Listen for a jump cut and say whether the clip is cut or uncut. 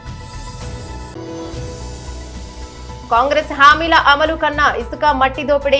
uncut